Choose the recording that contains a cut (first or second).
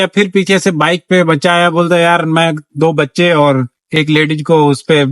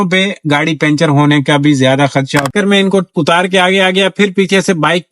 second